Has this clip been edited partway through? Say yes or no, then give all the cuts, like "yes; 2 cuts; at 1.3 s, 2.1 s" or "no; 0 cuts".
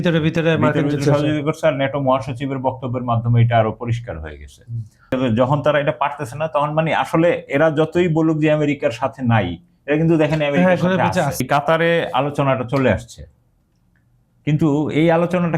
yes; 2 cuts; at 5.1 s, 11.4 s